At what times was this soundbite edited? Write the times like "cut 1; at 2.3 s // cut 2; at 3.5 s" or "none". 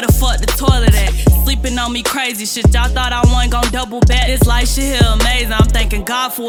none